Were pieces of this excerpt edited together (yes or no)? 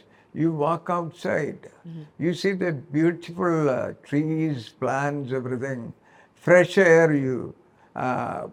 no